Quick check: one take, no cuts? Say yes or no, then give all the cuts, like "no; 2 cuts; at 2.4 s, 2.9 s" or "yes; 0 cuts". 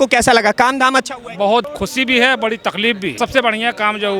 no; 2 cuts; at 1.7 s, 3.2 s